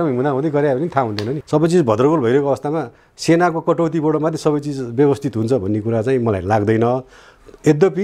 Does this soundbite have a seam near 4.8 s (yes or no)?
no